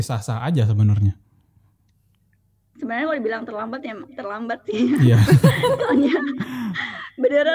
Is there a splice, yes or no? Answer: no